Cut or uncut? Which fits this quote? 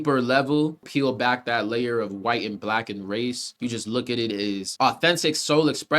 cut